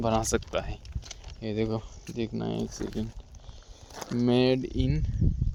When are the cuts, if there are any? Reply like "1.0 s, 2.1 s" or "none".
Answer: none